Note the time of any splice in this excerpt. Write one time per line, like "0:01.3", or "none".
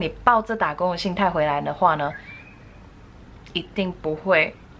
none